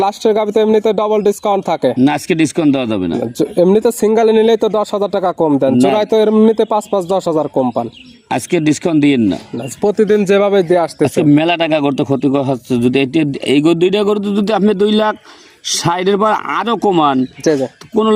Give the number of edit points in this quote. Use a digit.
0